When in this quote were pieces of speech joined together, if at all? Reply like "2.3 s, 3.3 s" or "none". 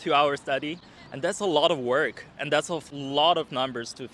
none